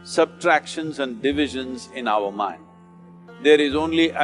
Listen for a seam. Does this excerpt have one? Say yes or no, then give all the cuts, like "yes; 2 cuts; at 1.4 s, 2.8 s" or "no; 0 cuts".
no; 0 cuts